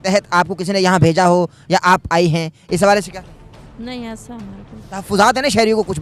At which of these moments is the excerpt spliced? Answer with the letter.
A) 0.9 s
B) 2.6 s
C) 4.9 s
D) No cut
D